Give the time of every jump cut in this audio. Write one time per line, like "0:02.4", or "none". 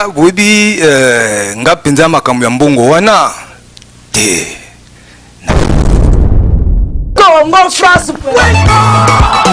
0:05.3